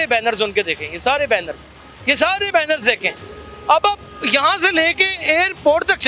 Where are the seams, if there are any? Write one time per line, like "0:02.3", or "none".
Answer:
none

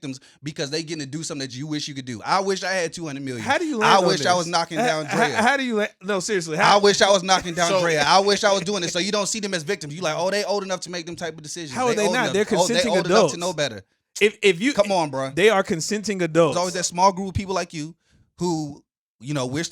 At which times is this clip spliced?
0:16.5

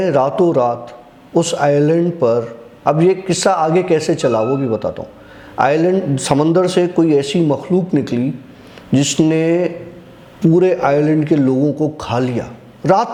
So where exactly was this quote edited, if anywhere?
none

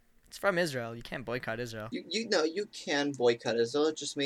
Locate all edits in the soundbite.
0:01.8

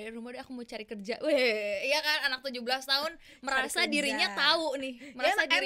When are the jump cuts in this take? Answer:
none

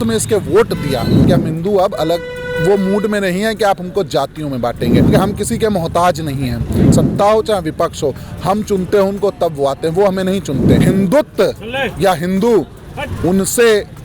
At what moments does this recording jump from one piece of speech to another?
0:01.2
0:05.1
0:06.9
0:10.8

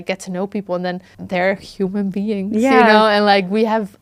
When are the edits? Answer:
0:01.1

